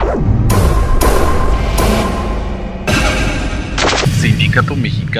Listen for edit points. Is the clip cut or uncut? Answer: uncut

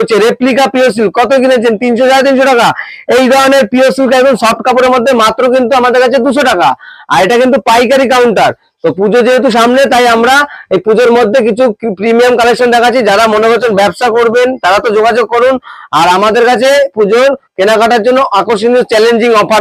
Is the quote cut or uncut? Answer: uncut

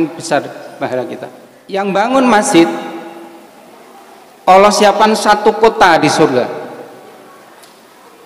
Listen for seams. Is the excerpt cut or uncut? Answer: cut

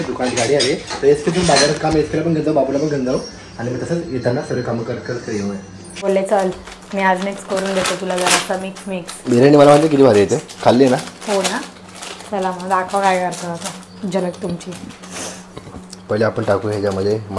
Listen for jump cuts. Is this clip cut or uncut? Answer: cut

